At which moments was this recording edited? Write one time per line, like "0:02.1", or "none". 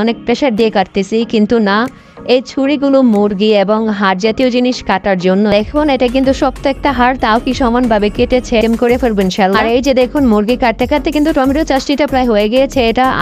0:05.5
0:08.6